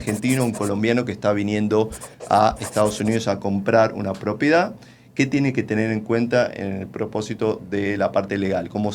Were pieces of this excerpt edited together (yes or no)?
no